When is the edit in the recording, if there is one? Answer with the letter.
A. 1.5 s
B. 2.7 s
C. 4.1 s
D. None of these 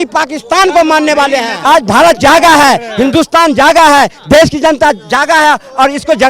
A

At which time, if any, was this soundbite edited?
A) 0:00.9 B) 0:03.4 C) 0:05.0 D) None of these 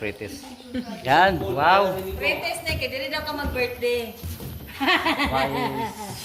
A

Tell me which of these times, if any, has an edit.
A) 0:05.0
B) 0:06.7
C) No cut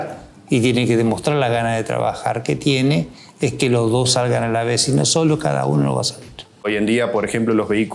B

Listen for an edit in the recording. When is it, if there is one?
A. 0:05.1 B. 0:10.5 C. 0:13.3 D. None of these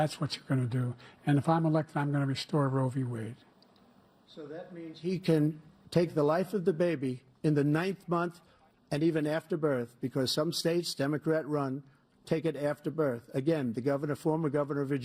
D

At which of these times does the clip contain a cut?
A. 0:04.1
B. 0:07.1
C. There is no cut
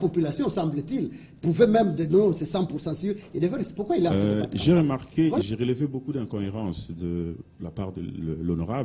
A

